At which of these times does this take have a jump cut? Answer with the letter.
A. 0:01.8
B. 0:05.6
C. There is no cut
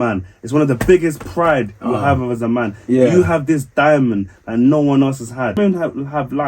B